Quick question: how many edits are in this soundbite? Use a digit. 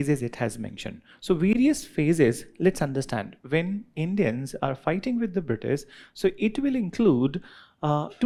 0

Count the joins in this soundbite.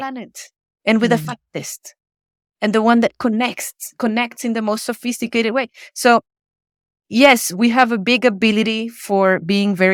0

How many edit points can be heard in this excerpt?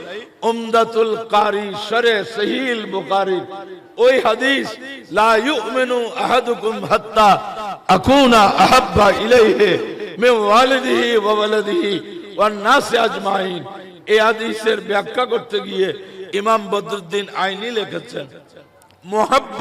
0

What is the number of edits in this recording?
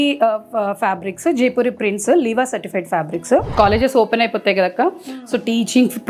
1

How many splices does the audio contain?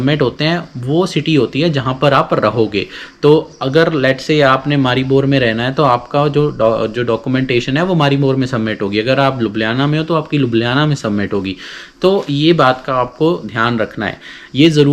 0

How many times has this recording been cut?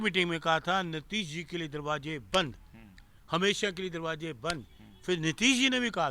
0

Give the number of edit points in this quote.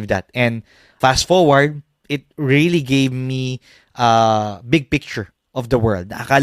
1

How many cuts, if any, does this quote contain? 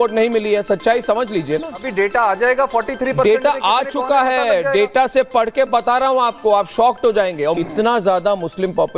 2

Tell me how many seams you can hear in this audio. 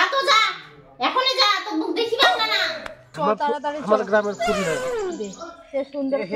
1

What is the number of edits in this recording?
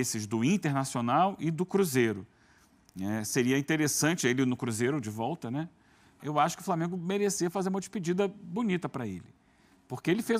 1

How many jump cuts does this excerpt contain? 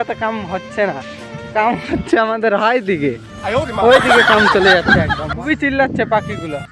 1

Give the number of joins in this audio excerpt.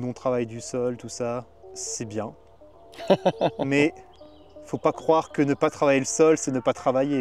0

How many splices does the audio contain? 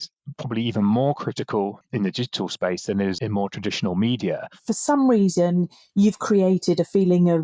3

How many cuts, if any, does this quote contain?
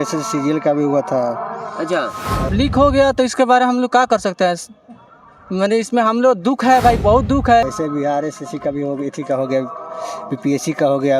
2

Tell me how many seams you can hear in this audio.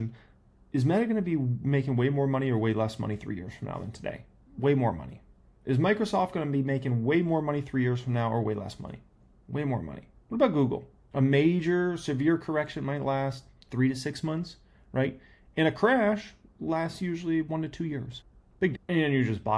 2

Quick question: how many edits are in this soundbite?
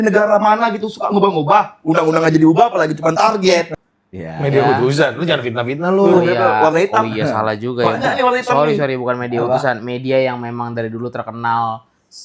1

